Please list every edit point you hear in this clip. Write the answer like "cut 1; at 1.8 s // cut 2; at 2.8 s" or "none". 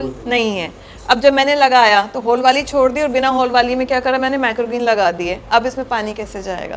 none